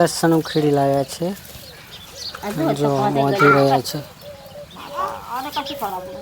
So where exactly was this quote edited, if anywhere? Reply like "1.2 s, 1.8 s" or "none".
none